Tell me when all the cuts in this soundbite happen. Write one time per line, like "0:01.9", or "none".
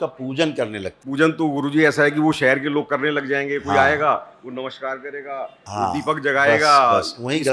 0:01.0